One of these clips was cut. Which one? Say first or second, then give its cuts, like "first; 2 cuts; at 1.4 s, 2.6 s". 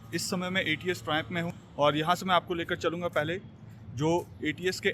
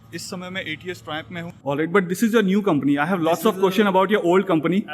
second; 1 cut; at 1.6 s